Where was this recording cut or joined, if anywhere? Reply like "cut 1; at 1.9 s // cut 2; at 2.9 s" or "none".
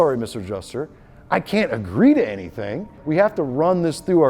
cut 1; at 3.0 s